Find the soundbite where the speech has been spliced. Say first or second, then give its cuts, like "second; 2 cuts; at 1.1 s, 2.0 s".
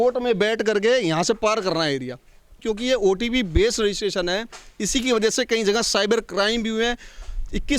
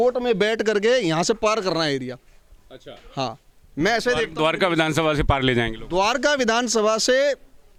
first; 1 cut; at 2.6 s